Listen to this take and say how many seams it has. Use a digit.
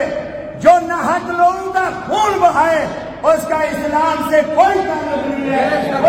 0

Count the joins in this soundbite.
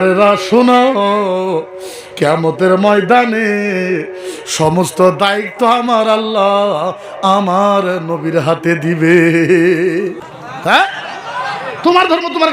1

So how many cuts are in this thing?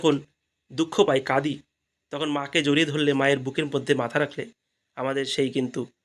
0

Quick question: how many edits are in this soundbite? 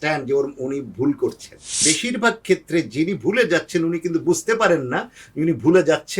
1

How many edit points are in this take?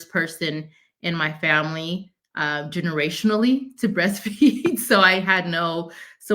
0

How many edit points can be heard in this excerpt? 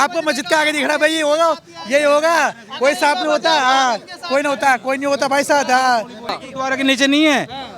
1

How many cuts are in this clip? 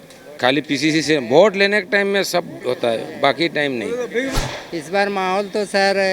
1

